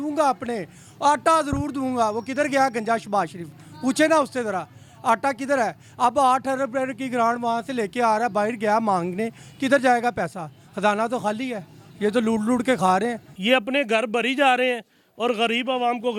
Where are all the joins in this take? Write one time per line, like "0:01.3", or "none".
0:13.3